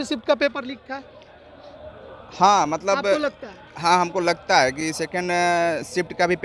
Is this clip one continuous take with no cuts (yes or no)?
yes